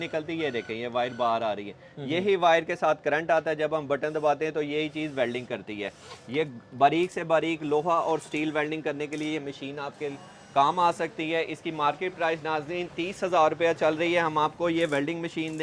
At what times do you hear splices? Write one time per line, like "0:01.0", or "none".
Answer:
none

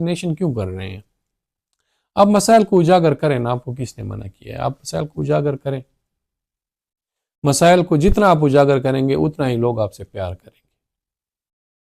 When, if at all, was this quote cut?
none

